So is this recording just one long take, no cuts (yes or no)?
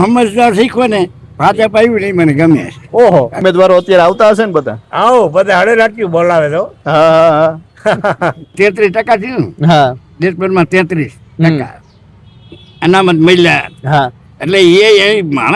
no